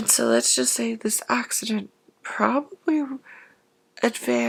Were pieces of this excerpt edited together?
no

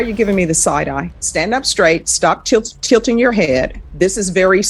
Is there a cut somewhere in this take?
yes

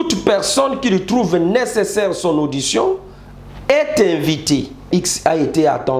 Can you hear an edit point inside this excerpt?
yes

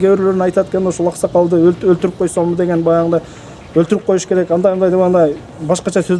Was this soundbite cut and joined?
no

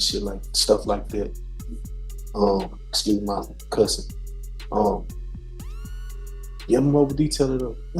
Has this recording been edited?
no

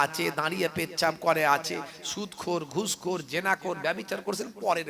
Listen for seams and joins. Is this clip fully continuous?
yes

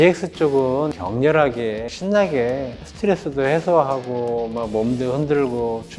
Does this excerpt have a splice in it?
yes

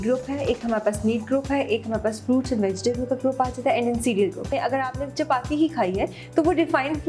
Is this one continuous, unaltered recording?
no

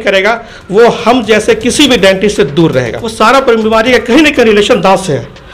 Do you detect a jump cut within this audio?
yes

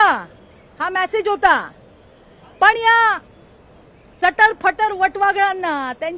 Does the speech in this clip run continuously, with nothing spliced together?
yes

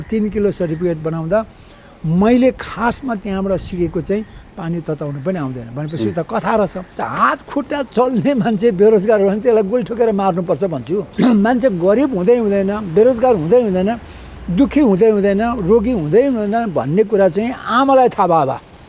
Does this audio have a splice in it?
yes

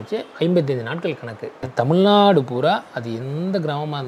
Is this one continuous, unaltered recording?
no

